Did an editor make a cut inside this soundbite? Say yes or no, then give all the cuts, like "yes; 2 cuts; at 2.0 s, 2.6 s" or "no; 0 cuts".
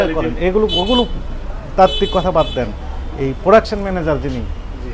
no; 0 cuts